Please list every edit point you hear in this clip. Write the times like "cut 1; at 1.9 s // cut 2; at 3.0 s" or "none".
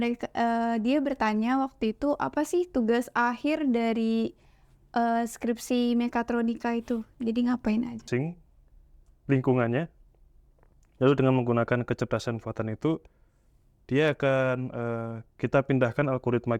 cut 1; at 8.0 s